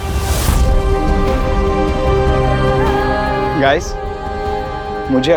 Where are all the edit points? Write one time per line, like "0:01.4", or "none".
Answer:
none

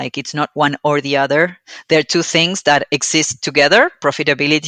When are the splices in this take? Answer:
none

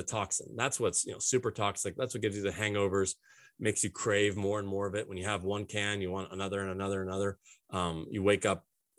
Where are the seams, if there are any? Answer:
none

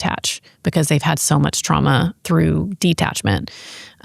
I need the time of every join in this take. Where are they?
0:02.2

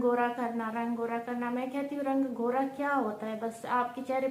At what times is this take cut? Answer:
none

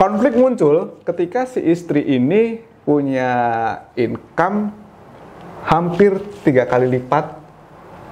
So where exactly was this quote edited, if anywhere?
none

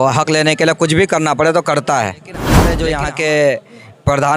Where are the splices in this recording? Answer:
0:02.8

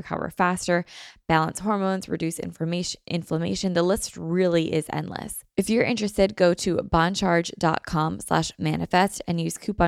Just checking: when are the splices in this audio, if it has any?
0:05.4

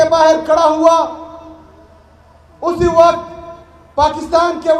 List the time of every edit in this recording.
none

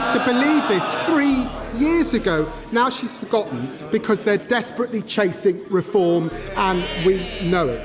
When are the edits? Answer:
none

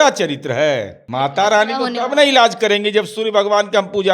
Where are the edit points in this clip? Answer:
0:01.0

